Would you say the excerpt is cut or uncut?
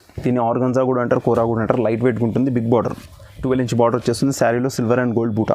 uncut